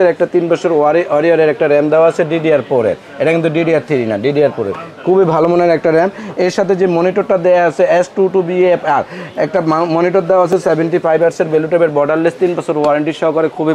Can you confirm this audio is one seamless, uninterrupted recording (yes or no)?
yes